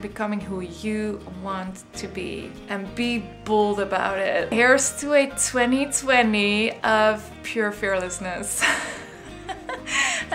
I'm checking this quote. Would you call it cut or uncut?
cut